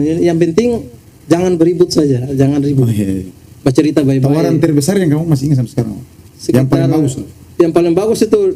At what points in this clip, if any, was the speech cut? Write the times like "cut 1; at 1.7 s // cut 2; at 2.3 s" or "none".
none